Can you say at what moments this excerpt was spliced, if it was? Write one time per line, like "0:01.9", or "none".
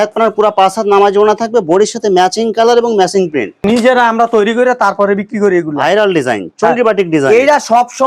0:03.6